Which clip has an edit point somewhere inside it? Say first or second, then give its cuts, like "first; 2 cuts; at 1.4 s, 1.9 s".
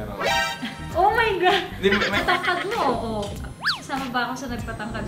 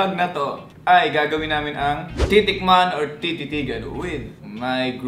first; 1 cut; at 2.2 s